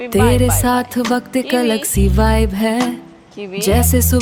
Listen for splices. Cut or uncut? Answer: uncut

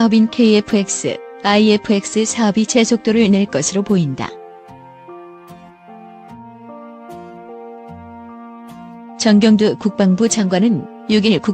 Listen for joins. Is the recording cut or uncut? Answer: cut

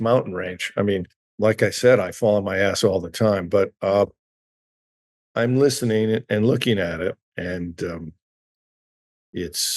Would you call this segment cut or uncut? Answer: cut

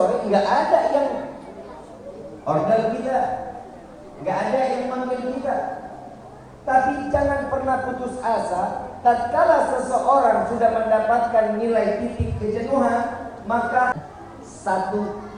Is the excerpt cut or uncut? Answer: cut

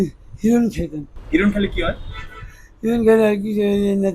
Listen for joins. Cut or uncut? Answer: cut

